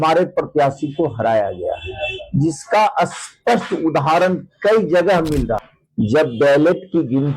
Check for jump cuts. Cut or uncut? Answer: cut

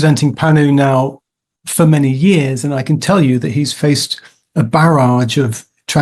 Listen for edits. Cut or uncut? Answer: uncut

